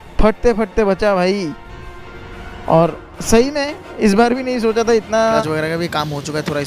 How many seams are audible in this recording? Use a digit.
1